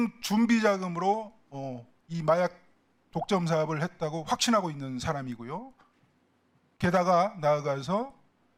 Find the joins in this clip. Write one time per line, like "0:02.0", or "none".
none